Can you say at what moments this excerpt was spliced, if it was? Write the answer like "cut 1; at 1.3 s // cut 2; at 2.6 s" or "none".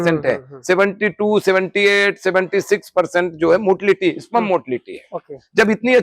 none